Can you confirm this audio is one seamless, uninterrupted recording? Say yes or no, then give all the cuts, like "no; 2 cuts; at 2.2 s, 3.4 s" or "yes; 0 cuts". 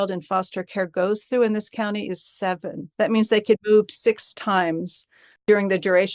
no; 2 cuts; at 2.8 s, 3.6 s